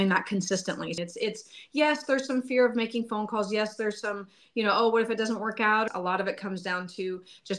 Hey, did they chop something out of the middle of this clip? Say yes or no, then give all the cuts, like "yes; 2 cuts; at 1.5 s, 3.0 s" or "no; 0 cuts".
yes; 2 cuts; at 0.9 s, 5.9 s